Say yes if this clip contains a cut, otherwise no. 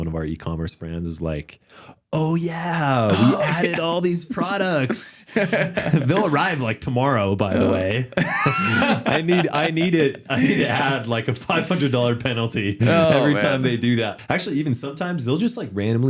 yes